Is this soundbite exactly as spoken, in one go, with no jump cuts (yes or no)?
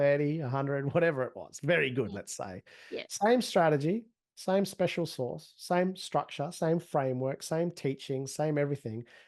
yes